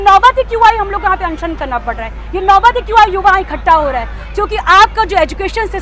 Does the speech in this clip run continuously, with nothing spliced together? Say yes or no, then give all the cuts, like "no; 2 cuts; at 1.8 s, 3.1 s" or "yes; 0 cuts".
yes; 0 cuts